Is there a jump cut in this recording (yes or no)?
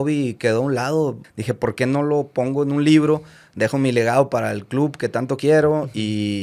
yes